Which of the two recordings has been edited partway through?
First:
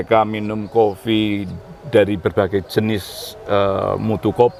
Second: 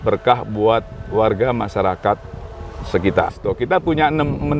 second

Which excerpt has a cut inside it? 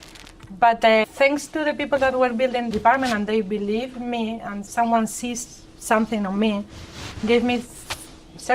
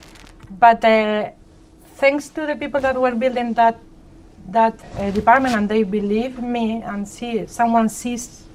first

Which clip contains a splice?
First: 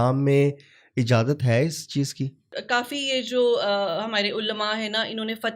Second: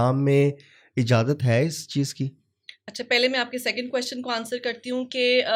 first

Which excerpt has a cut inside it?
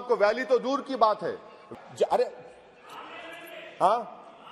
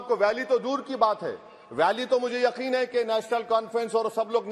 first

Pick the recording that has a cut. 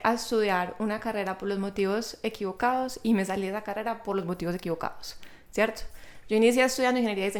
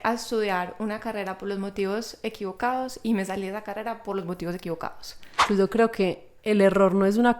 second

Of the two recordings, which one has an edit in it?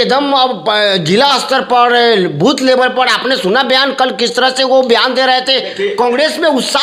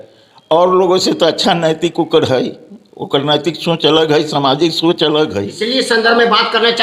second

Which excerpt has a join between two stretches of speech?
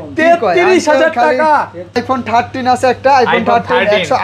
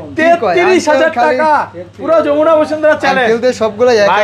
first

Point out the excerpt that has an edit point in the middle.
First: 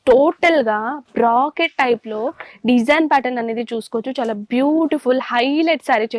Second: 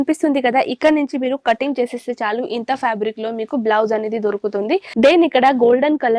second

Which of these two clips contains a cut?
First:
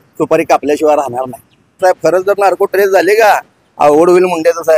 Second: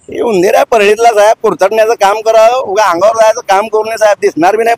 first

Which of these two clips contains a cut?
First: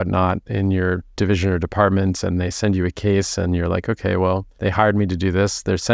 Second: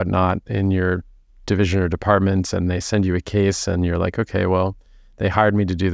first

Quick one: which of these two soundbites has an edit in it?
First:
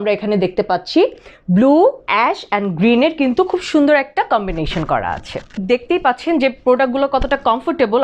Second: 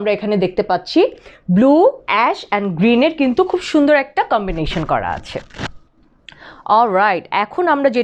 first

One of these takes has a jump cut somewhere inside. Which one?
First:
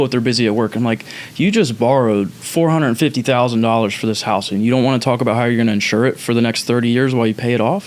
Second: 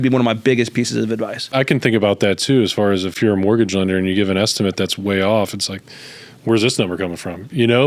second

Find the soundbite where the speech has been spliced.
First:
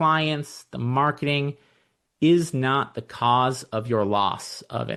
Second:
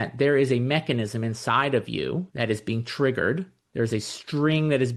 second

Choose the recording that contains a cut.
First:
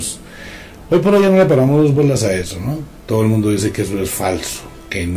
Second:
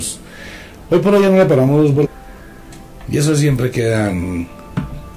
first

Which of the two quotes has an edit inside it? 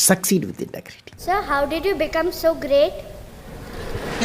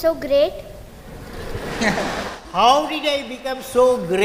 first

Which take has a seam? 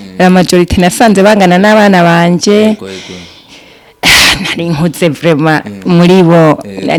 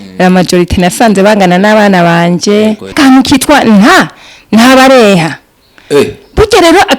second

